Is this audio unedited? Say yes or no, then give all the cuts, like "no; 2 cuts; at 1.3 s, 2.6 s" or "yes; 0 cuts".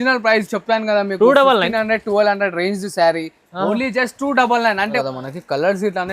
no; 1 cut; at 5.0 s